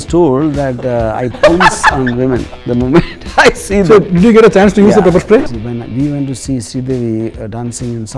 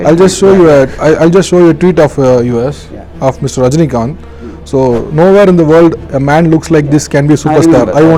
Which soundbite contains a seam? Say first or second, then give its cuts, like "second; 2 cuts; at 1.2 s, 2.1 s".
first; 1 cut; at 5.4 s